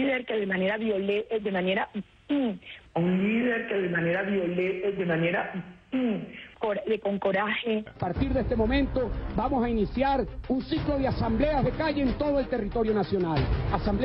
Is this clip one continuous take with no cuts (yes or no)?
no